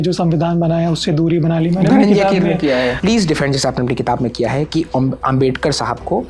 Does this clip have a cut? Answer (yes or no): yes